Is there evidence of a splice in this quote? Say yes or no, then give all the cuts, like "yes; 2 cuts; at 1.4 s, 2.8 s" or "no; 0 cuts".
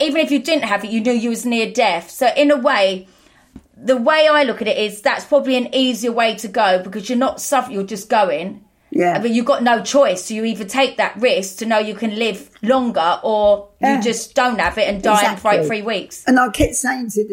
yes; 1 cut; at 16.2 s